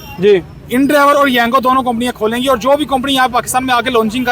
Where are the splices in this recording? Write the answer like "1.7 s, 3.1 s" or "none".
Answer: none